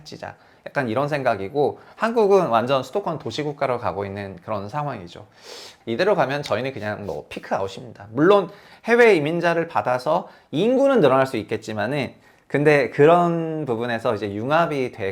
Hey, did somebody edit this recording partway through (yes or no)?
yes